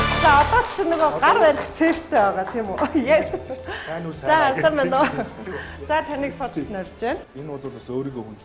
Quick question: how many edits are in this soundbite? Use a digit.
1